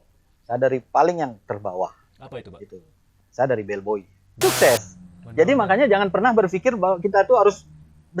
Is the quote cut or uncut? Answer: cut